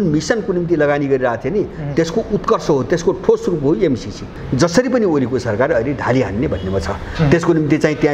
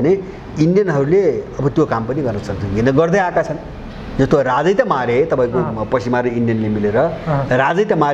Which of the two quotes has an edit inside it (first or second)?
first